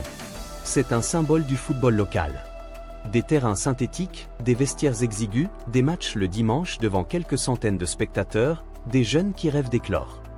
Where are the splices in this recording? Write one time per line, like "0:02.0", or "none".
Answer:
none